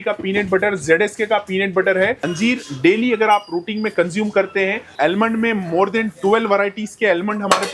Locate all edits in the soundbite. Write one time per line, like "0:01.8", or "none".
0:02.2
0:04.9

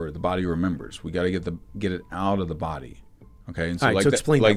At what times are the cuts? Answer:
none

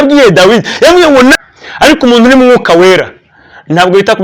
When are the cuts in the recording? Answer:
0:01.3

